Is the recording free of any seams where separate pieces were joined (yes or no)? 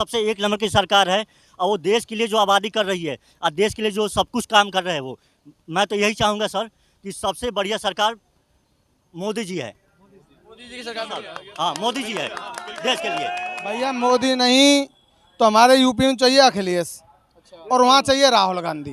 no